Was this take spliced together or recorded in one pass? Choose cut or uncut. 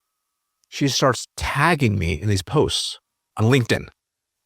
cut